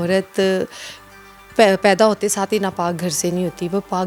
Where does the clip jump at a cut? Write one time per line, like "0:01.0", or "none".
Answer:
none